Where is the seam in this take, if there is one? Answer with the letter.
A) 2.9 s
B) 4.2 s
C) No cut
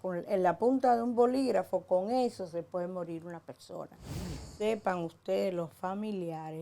B